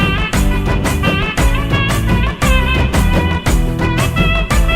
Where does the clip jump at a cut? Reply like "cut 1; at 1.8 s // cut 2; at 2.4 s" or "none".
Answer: none